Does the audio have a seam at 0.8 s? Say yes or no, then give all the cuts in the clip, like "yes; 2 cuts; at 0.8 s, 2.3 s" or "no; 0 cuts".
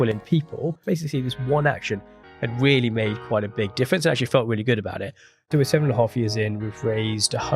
yes; 2 cuts; at 0.8 s, 5.5 s